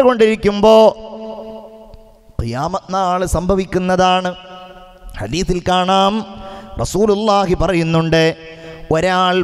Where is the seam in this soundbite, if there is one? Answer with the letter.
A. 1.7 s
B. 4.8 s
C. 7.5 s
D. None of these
D